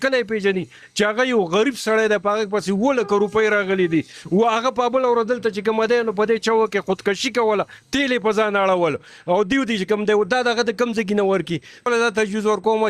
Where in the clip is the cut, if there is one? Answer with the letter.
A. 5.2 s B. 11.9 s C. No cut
B